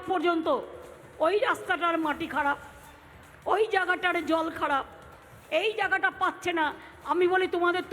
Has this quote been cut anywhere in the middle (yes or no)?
no